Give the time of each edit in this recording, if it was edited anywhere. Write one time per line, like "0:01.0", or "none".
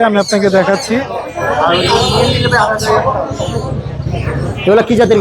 0:01.2